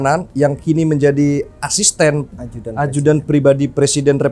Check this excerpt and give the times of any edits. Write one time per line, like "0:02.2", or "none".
none